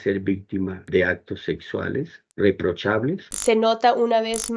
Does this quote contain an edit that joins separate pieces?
yes; 1 cut; at 3.2 s

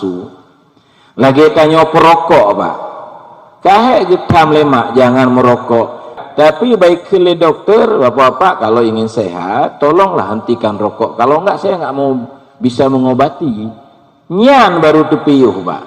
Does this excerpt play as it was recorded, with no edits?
no; 1 cut; at 6.2 s

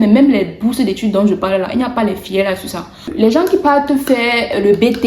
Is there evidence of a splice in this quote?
yes; 1 cut; at 3.1 s

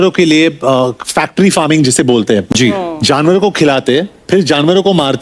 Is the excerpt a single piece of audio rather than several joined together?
yes; 0 cuts

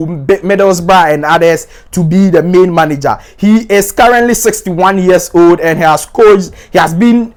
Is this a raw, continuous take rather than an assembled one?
yes; 0 cuts

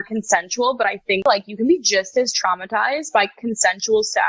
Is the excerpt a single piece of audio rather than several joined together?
no; 1 cut; at 1.1 s

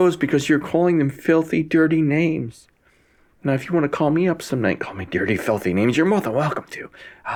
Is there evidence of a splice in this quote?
no; 0 cuts

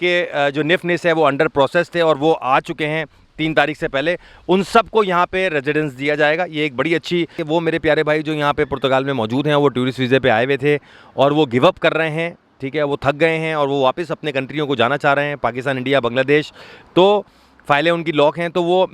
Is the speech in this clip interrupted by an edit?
yes; 1 cut; at 7.4 s

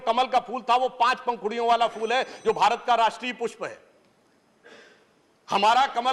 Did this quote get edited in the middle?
no; 0 cuts

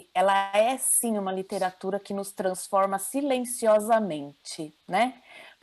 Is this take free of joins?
yes; 0 cuts

